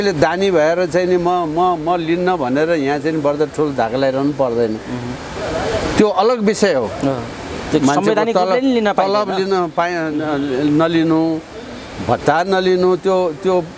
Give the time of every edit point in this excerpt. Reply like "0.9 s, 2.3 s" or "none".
none